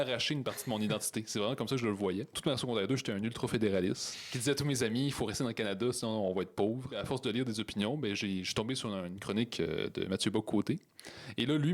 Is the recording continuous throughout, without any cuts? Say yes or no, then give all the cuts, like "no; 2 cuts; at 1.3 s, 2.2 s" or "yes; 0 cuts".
no; 2 cuts; at 2.4 s, 7.0 s